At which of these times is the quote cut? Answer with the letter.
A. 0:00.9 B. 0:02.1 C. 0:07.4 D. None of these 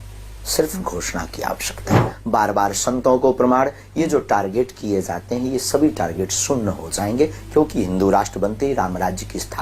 B